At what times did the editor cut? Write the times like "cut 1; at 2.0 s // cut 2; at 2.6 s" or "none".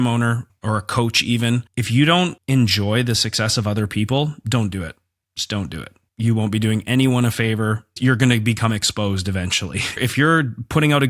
cut 1; at 9.9 s